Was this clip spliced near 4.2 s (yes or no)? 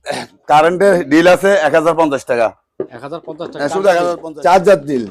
yes